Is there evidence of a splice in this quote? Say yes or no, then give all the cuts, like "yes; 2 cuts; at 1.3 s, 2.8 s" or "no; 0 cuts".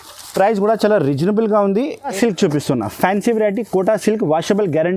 yes; 1 cut; at 2.1 s